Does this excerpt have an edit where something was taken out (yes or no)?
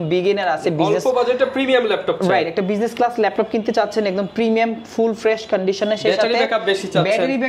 no